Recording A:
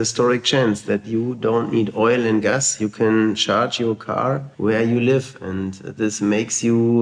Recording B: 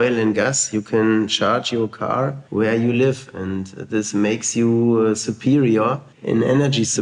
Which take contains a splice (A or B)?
B